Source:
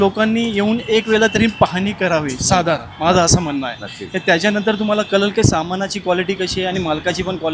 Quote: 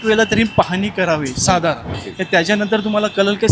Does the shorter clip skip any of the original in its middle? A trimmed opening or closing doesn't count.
yes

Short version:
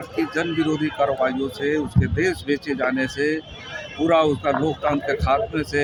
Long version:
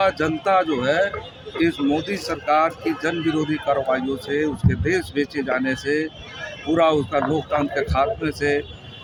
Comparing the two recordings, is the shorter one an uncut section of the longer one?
yes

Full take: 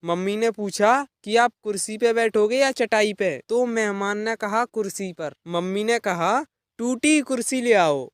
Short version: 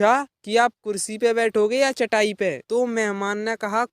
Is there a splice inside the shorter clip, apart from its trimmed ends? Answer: no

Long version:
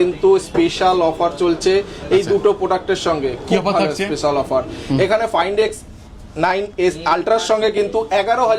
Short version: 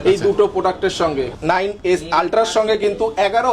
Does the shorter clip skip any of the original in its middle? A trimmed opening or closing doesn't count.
yes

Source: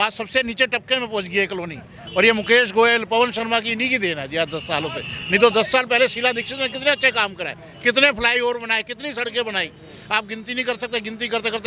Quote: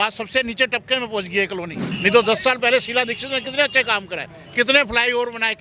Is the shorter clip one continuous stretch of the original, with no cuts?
no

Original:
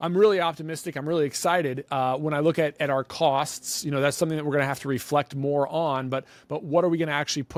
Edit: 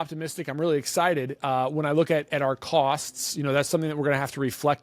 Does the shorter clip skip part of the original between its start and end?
no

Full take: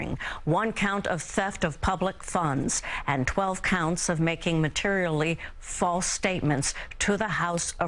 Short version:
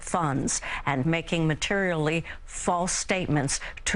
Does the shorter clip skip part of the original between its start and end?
yes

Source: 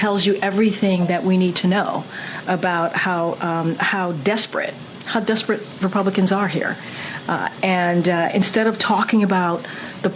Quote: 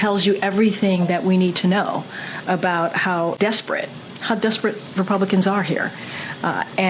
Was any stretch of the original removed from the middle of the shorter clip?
yes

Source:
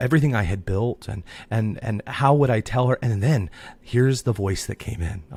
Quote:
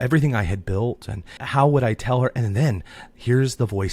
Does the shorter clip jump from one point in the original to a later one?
yes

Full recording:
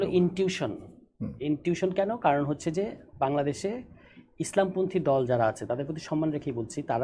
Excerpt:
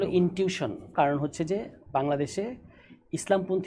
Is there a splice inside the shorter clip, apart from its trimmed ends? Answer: yes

